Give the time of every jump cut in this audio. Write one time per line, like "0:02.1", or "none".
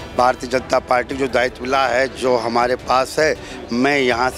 none